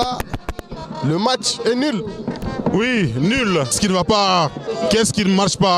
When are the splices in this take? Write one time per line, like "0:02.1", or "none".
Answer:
0:03.7